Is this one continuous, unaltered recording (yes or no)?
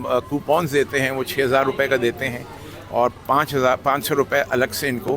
yes